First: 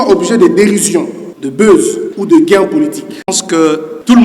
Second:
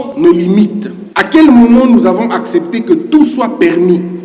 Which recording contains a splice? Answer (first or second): first